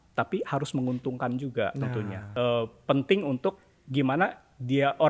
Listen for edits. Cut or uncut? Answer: cut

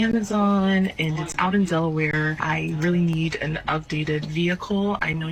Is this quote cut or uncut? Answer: uncut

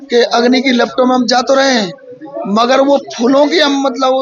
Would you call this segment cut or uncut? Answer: uncut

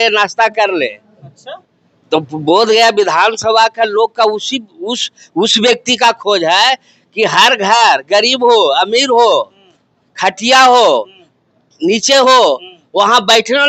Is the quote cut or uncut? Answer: uncut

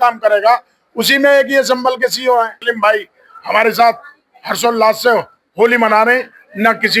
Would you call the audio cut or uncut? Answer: cut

